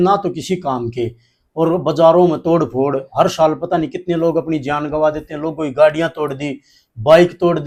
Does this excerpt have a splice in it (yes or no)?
no